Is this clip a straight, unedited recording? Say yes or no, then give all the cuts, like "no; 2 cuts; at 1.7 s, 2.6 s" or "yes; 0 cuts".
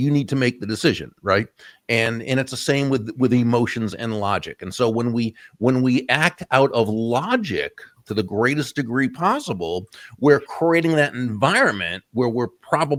yes; 0 cuts